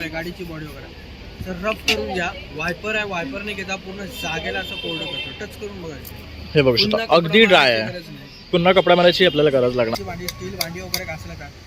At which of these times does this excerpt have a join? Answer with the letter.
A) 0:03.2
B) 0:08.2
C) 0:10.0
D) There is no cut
C